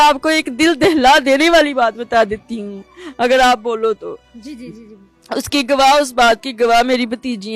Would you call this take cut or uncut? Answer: uncut